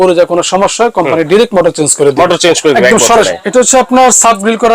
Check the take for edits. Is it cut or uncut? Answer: cut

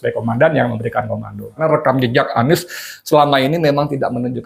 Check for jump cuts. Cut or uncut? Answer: cut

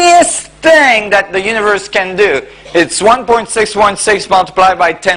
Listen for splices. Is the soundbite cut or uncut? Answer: uncut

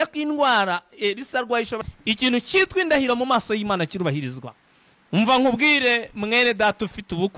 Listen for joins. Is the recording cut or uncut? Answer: cut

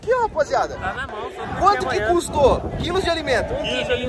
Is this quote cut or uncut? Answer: uncut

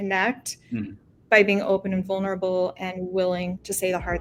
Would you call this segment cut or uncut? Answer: uncut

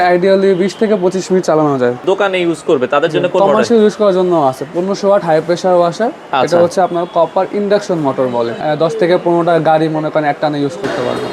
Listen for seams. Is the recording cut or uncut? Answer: cut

